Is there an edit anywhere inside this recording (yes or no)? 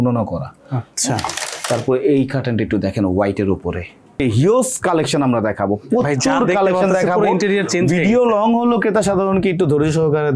yes